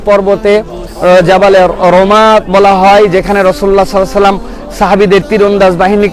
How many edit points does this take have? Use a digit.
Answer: 0